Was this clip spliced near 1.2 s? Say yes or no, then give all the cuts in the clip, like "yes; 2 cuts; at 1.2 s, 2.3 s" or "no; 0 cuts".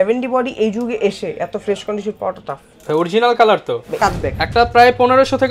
no; 1 cut; at 3.9 s